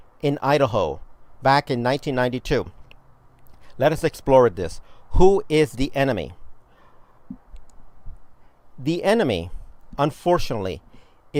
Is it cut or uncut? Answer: uncut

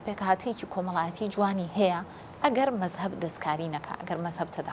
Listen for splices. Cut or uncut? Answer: uncut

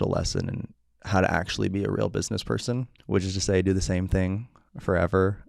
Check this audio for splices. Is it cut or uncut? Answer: cut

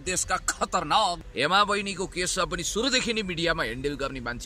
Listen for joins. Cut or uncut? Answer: cut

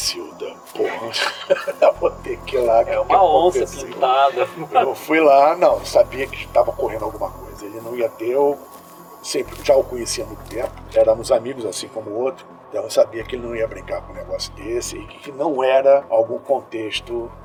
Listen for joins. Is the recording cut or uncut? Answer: uncut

